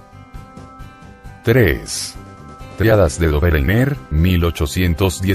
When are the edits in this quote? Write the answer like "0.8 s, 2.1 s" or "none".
3.5 s